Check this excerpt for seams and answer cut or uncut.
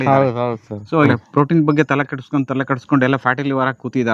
cut